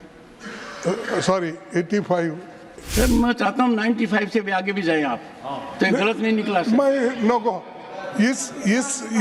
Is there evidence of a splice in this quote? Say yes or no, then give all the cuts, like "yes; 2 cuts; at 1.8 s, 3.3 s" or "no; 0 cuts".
yes; 1 cut; at 2.8 s